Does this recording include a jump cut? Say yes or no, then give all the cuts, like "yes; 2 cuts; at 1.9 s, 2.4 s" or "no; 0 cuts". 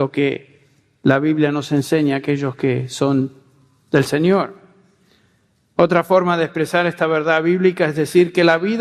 no; 0 cuts